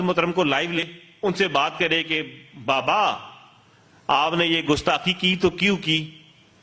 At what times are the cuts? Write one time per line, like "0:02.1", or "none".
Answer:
0:01.0